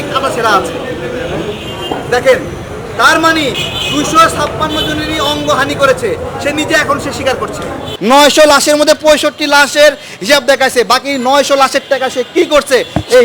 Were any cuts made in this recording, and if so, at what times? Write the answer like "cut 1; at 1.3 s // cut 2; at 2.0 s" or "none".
cut 1; at 7.9 s